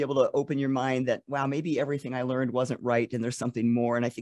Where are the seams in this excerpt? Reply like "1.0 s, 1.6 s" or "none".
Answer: none